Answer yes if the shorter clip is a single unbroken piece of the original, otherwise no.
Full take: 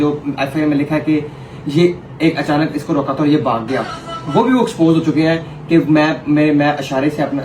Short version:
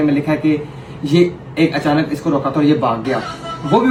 yes